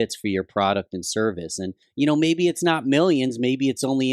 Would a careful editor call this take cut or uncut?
cut